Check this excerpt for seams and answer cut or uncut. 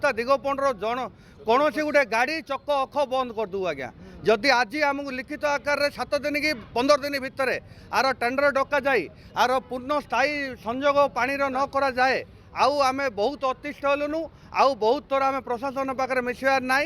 uncut